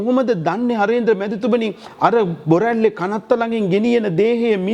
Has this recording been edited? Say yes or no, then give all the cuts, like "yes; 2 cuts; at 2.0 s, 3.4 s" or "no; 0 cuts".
no; 0 cuts